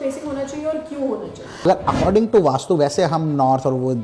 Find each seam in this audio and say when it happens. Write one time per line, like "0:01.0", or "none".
0:01.6